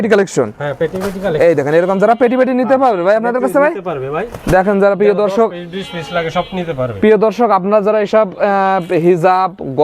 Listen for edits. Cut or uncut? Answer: uncut